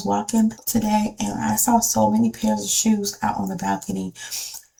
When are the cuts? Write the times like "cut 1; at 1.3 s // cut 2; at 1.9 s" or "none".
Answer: none